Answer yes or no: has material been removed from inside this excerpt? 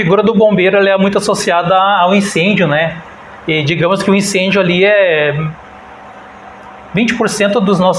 no